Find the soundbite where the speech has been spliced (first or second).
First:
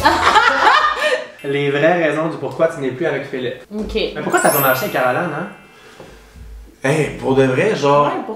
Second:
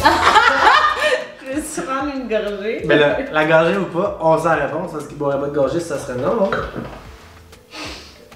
first